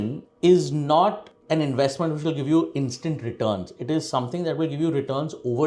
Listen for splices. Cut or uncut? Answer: uncut